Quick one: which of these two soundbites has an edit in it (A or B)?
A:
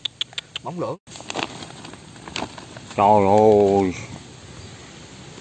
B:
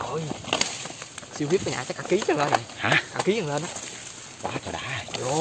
A